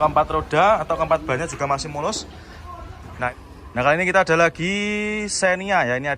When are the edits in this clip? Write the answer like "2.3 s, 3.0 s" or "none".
3.3 s